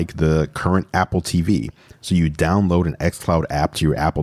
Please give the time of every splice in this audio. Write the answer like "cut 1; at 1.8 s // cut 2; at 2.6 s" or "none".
none

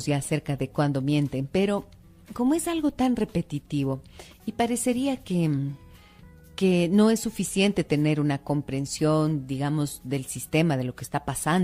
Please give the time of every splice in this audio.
cut 1; at 4.1 s

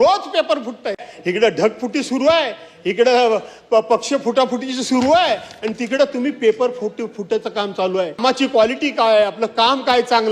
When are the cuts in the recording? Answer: cut 1; at 1.1 s // cut 2; at 8.2 s

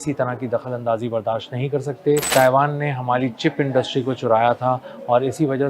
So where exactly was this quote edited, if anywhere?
cut 1; at 2.3 s

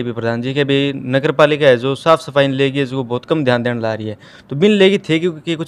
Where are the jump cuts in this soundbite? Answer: none

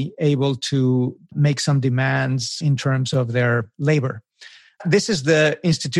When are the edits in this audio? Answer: cut 1; at 1.3 s // cut 2; at 2.6 s // cut 3; at 4.8 s

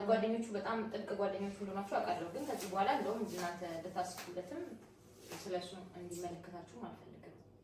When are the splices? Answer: none

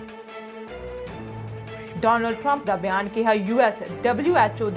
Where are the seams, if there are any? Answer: cut 1; at 0.9 s // cut 2; at 1.9 s

